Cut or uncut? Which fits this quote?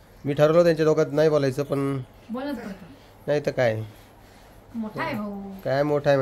uncut